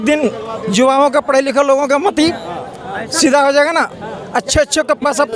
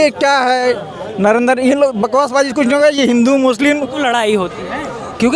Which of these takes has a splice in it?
second; 1 cut; at 4.0 s

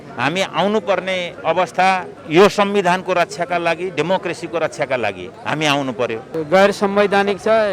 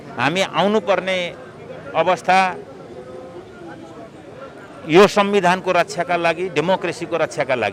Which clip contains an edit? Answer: first; 4 cuts; at 1.3 s, 2.2 s, 5.3 s, 6.4 s

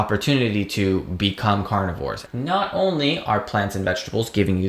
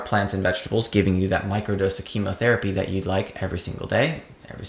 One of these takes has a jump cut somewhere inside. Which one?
first; 1 cut; at 2.2 s

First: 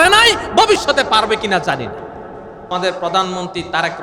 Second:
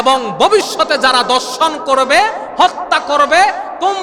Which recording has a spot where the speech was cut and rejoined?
first; 1 cut; at 2.6 s

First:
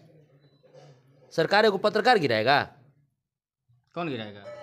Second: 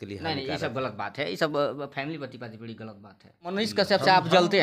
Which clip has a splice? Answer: second; 1 cut; at 3.5 s

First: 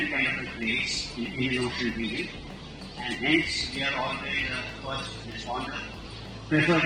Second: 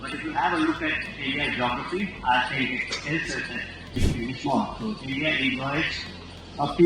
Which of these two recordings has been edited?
second; 1 cut; at 3.9 s

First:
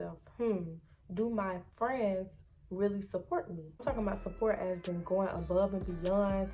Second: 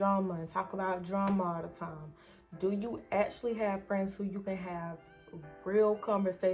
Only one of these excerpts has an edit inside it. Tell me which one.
first; 1 cut; at 3.8 s

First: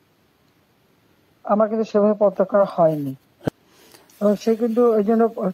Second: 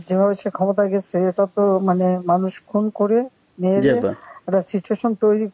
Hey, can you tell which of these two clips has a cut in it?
first; 1 cut; at 3.5 s

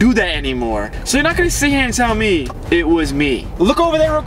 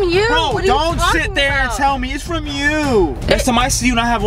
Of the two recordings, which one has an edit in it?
first; 3 cuts; at 0.9 s, 2.5 s, 3.5 s

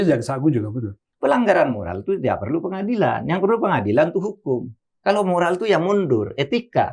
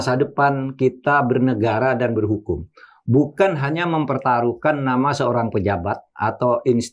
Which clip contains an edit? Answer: first; 1 cut; at 1.0 s

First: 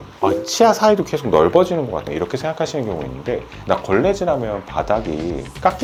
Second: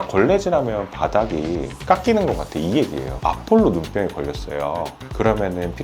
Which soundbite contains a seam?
second; 1 cut; at 3.1 s

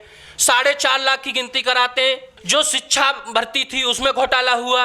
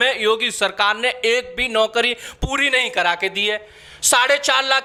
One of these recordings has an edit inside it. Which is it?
first; 1 cut; at 2.3 s

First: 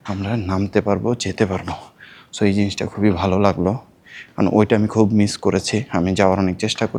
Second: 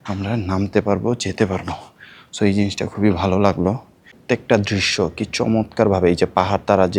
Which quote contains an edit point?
second; 1 cut; at 4.2 s

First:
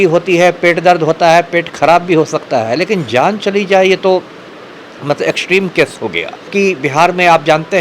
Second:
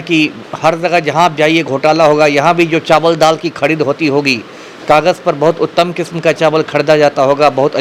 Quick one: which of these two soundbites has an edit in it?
first; 1 cut; at 6.5 s

